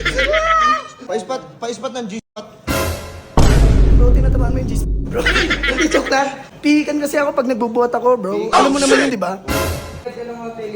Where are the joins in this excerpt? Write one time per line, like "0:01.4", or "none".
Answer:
0:01.1
0:06.4
0:10.0